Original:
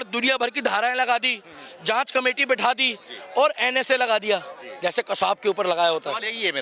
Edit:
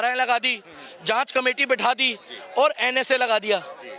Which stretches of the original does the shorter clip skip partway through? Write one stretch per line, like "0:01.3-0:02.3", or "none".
none